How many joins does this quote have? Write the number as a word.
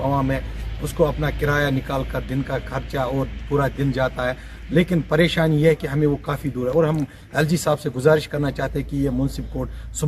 zero